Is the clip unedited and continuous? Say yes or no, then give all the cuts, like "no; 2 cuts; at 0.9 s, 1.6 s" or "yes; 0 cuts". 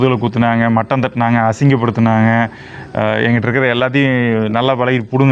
yes; 0 cuts